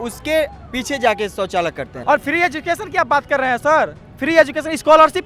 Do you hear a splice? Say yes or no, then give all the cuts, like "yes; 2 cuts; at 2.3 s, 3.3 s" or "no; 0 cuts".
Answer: yes; 1 cut; at 1.9 s